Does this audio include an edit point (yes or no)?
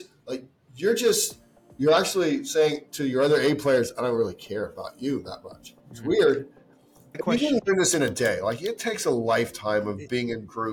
yes